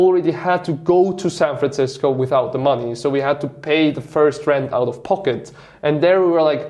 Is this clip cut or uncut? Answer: uncut